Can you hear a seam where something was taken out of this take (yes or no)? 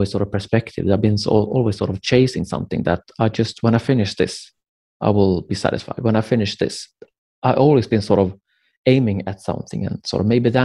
no